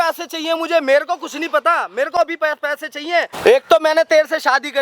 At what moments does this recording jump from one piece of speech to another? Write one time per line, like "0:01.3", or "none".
0:03.3